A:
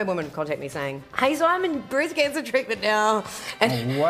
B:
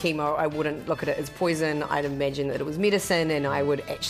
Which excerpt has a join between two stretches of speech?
A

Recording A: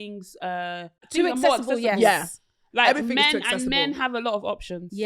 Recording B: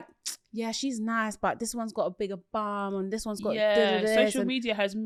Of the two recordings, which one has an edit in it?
A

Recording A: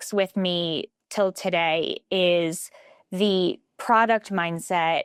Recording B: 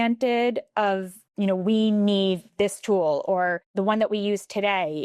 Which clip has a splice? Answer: B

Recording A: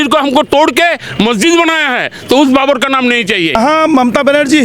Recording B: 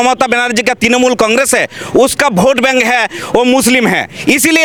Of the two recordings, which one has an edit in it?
A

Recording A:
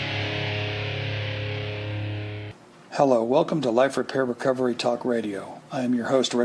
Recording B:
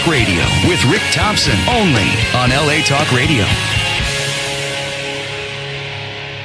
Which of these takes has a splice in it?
A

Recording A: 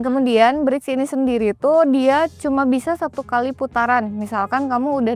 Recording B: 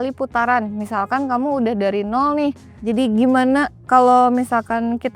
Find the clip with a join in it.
B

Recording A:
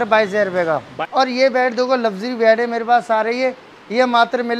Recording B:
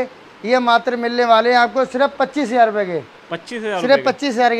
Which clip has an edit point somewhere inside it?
A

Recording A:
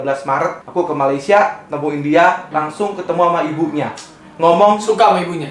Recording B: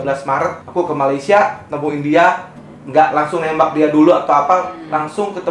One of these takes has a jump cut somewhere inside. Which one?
A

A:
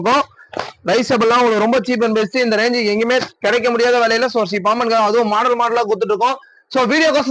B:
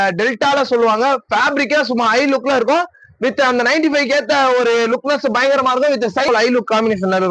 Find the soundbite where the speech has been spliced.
B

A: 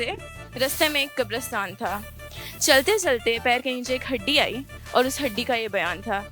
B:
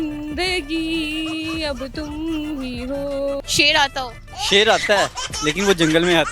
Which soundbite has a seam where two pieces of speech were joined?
B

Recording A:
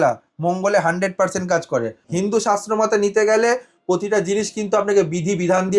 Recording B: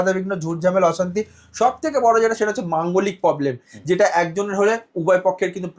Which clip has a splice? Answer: A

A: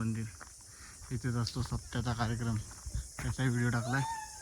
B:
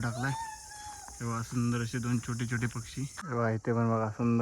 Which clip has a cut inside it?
B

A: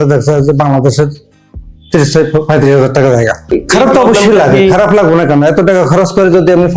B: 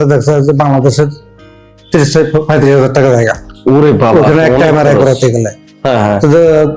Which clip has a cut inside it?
A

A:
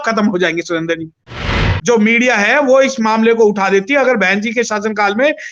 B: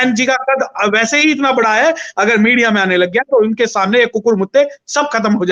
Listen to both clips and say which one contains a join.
A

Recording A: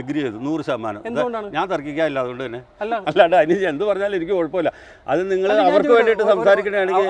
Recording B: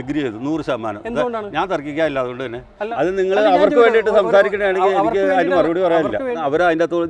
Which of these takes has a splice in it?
B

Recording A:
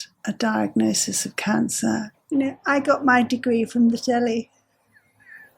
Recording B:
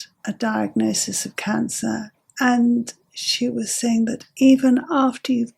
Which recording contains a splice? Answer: A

